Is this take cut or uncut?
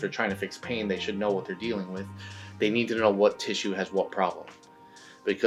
uncut